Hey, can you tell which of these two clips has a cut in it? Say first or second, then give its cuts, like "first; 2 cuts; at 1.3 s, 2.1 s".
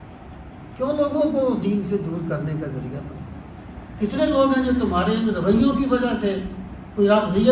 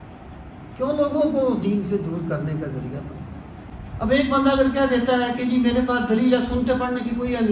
second; 1 cut; at 3.7 s